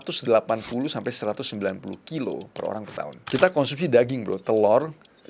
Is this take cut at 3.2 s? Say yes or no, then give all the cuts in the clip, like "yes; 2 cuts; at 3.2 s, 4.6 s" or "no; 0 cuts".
yes; 1 cut; at 3.2 s